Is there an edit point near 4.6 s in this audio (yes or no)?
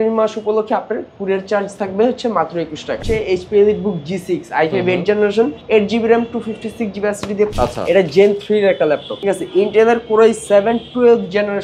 no